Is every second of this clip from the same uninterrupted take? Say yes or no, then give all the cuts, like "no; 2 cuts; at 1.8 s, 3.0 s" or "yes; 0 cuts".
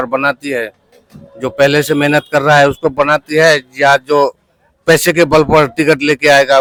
yes; 0 cuts